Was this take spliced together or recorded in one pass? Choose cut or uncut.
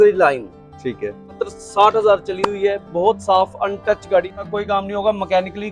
cut